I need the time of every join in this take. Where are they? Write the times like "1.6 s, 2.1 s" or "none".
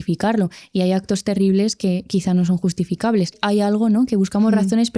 3.4 s

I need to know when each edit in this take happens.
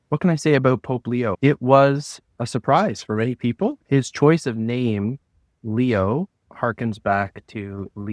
3.8 s

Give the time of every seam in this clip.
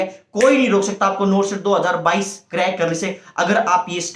none

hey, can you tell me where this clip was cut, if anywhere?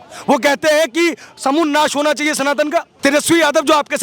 2.9 s

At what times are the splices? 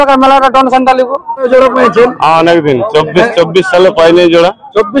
1.5 s

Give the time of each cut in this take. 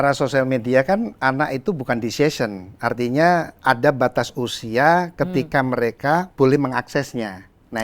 6.3 s

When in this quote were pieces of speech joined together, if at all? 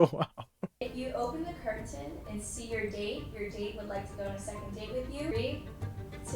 1.0 s, 5.3 s

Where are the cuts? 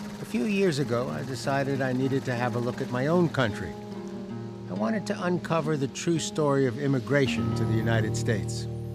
none

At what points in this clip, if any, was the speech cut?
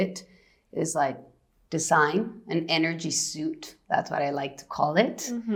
none

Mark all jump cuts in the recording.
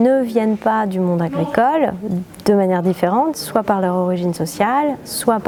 none

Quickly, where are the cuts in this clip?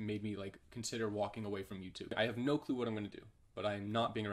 2.1 s

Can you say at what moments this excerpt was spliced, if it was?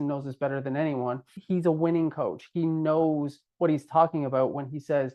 1.4 s

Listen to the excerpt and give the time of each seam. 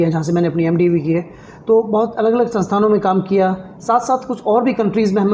none

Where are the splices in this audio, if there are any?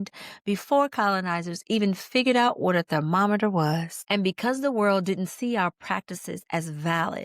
3.9 s

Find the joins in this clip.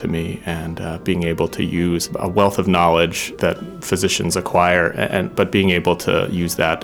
2.1 s, 3.3 s

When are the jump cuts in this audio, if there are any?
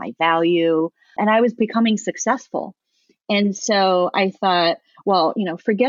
1.2 s

